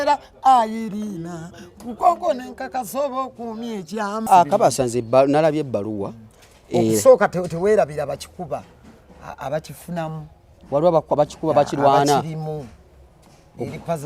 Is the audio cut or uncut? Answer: cut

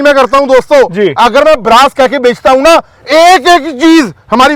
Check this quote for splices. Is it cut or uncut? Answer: uncut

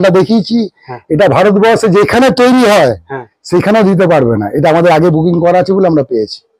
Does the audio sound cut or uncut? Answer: uncut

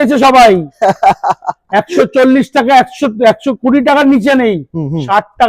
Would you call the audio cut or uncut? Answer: uncut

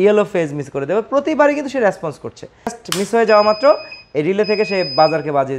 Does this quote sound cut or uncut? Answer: cut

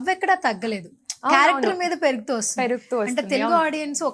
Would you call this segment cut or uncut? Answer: uncut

